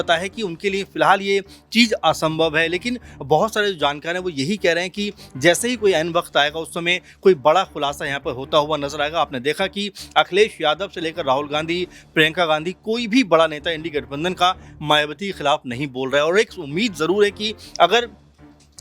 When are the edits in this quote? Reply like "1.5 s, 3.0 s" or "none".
none